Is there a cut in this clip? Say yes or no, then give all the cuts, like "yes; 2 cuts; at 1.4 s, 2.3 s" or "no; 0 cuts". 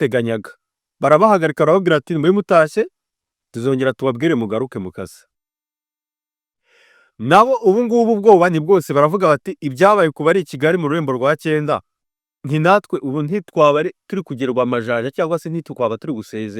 no; 0 cuts